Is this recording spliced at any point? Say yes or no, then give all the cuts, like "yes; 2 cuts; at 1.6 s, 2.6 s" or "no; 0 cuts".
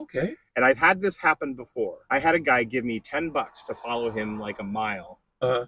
yes; 1 cut; at 2.0 s